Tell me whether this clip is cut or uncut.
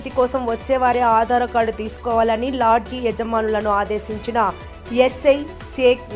uncut